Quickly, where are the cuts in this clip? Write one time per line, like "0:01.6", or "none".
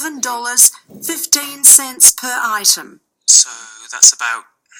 0:02.1